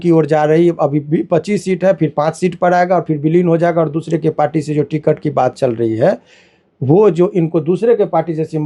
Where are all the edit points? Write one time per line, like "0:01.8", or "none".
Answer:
none